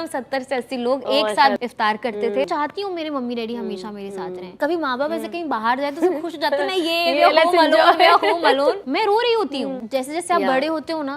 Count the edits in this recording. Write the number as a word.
five